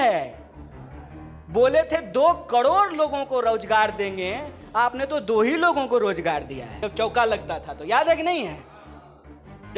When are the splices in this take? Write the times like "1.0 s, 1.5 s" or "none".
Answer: 6.6 s